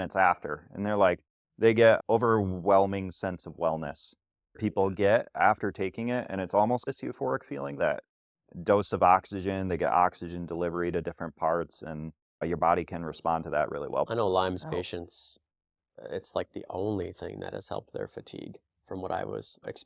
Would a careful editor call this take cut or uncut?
cut